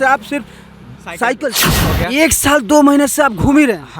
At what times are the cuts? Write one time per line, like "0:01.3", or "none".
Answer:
0:02.0